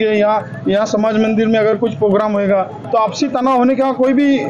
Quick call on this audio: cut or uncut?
uncut